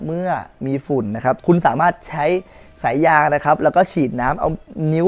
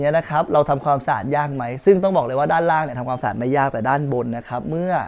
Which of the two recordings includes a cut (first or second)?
first